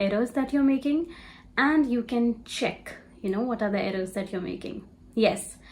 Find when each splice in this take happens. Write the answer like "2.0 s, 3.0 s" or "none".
none